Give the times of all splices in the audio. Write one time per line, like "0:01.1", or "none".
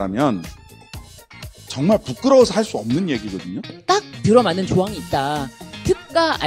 0:03.8